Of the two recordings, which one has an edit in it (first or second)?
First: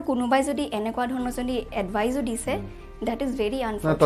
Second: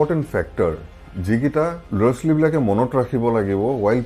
second